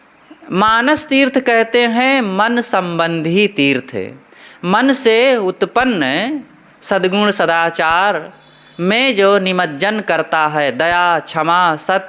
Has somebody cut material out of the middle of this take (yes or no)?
no